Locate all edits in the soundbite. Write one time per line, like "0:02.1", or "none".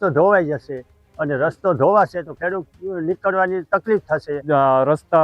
0:04.3